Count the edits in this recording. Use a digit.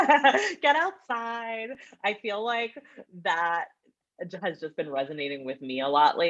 0